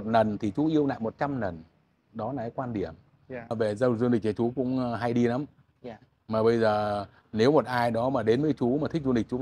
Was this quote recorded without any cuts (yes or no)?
no